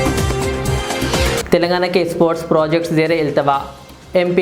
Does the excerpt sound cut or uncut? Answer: cut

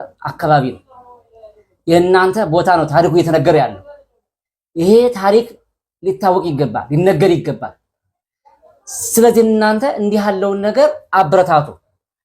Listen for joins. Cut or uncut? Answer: uncut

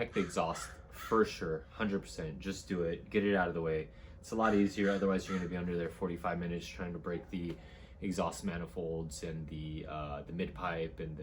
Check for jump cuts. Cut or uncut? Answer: uncut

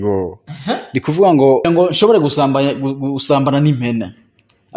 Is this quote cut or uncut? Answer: cut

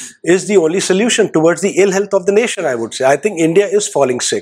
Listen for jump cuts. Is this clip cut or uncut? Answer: uncut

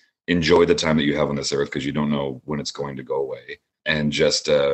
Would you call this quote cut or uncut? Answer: uncut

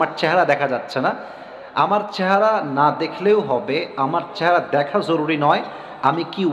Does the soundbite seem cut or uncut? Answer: uncut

